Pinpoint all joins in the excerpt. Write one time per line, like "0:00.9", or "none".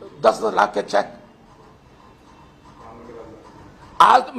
none